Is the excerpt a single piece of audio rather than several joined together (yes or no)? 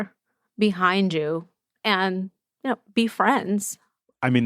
yes